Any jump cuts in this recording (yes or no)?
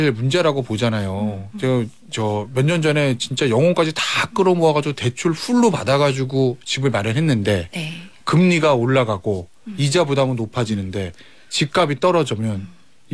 no